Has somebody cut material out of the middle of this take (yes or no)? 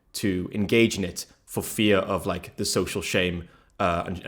no